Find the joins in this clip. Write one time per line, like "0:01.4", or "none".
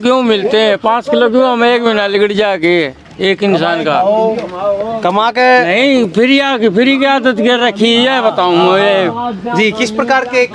none